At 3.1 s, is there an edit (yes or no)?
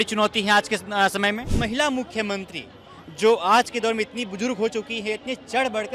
no